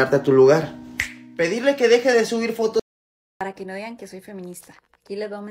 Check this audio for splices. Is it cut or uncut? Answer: cut